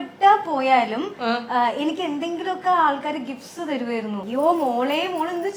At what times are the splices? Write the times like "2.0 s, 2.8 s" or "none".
none